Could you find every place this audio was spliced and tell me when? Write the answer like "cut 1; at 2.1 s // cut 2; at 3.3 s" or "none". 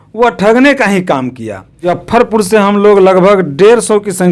cut 1; at 2.0 s